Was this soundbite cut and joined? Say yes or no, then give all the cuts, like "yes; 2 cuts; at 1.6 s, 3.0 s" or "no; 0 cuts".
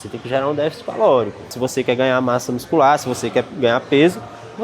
yes; 1 cut; at 1.6 s